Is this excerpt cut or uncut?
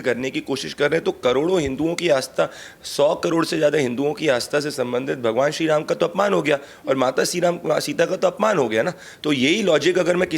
uncut